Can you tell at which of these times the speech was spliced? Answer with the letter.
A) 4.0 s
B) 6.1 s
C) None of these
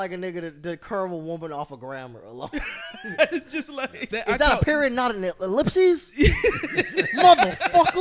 A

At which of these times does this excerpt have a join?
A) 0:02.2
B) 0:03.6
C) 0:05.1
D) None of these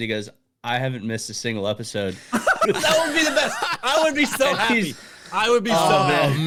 D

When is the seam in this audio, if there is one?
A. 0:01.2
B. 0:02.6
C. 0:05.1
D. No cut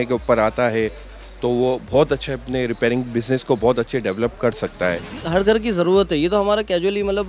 C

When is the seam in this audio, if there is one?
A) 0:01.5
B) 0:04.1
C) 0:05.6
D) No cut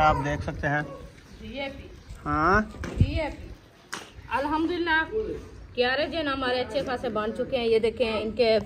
B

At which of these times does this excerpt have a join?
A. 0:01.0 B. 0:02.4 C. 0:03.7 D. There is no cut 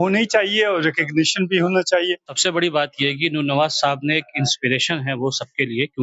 B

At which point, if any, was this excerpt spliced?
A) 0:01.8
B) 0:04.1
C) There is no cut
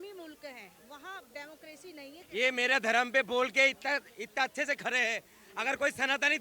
A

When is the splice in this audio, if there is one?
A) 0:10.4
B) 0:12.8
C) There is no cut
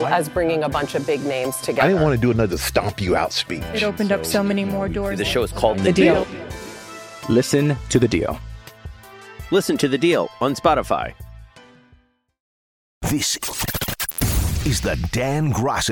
B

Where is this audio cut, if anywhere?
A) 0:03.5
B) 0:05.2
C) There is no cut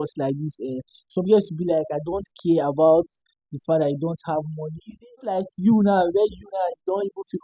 B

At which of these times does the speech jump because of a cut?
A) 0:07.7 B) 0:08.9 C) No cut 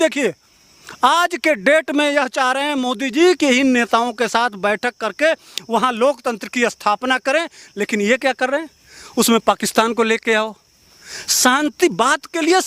C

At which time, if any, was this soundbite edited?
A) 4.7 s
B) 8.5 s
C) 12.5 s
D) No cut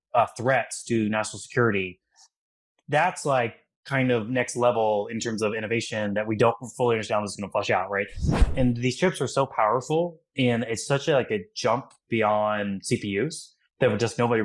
B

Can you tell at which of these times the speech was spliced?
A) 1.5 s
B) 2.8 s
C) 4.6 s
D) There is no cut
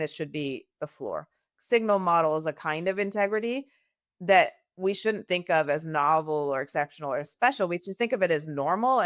A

